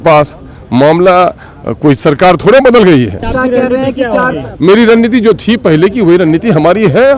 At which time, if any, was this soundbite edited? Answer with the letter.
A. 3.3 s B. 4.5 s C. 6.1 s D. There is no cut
A